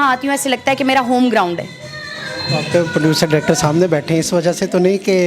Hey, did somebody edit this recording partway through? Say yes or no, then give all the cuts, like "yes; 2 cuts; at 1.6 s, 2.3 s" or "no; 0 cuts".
no; 0 cuts